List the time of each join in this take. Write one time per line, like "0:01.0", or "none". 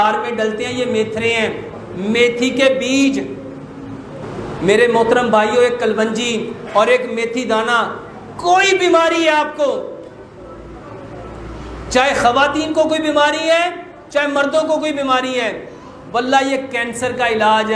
0:04.2